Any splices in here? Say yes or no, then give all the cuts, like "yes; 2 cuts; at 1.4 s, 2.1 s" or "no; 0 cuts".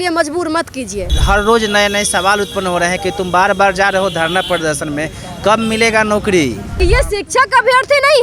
yes; 2 cuts; at 1.1 s, 6.7 s